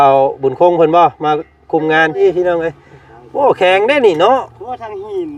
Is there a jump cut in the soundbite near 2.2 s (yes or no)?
yes